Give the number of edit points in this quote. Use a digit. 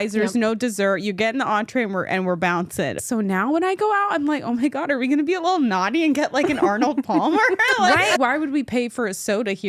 2